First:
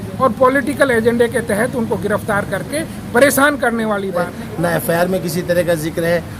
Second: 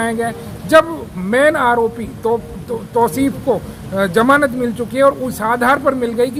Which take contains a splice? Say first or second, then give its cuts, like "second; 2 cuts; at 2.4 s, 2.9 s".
first; 1 cut; at 4.3 s